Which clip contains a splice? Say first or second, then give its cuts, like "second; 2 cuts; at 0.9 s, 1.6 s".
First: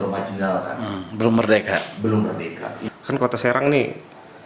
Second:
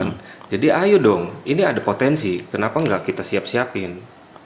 first; 1 cut; at 2.7 s